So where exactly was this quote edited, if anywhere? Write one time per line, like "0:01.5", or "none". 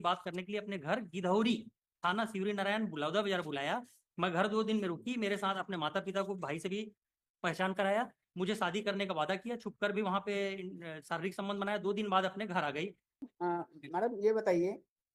0:13.3